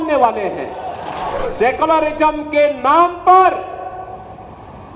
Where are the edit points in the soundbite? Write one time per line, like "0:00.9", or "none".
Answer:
0:01.4